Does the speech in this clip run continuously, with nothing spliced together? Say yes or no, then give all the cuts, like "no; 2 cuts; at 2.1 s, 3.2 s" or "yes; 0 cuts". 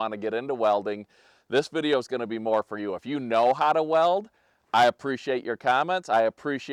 yes; 0 cuts